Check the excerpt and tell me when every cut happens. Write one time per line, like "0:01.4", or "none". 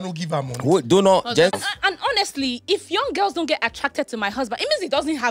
0:01.6

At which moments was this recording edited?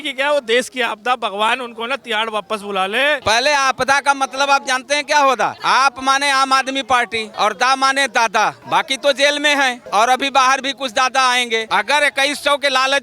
0:03.2
0:05.6
0:07.2
0:08.6
0:09.8
0:11.6

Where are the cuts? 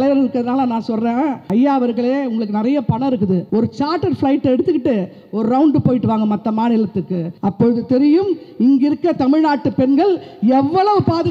0:01.4
0:03.4
0:07.3

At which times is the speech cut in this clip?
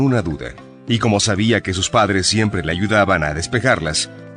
none

